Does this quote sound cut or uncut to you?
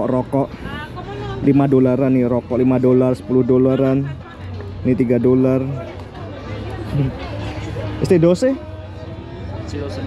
uncut